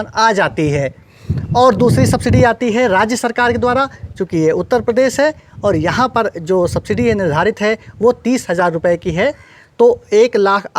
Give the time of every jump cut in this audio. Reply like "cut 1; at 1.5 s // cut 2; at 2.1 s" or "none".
none